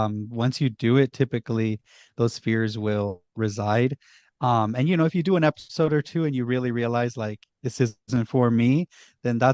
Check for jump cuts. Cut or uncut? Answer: cut